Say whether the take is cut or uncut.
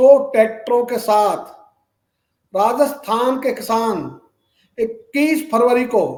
uncut